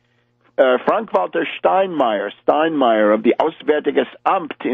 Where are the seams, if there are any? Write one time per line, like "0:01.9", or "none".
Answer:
0:01.0